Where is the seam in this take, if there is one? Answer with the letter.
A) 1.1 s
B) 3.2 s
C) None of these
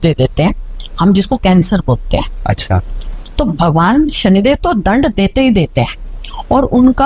B